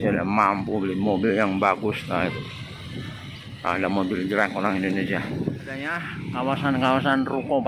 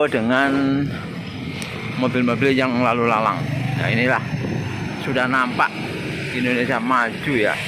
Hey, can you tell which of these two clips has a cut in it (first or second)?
first